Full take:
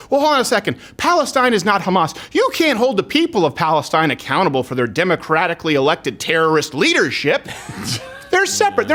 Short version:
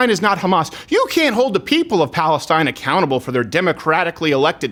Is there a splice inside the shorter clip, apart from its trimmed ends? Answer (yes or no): no